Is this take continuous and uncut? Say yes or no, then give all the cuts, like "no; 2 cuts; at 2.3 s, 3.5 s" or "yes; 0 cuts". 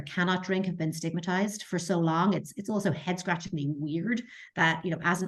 yes; 0 cuts